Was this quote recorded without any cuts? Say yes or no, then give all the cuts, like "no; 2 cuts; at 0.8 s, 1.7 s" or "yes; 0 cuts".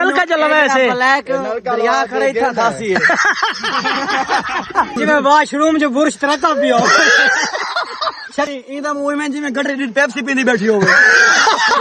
no; 2 cuts; at 5.0 s, 8.5 s